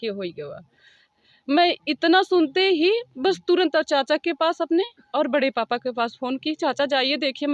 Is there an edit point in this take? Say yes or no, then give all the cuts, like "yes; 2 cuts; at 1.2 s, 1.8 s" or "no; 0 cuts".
no; 0 cuts